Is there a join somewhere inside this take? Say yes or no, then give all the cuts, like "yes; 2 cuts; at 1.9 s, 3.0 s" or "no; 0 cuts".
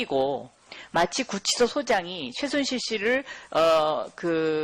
no; 0 cuts